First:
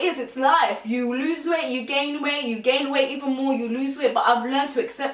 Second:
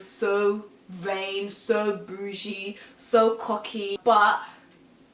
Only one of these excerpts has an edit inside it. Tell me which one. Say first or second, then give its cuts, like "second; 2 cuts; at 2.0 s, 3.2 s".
second; 1 cut; at 4.0 s